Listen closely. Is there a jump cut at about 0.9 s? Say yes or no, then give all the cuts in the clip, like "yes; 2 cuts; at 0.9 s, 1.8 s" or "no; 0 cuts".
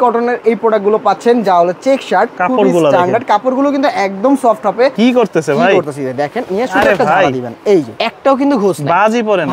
no; 3 cuts; at 2.4 s, 4.9 s, 8.0 s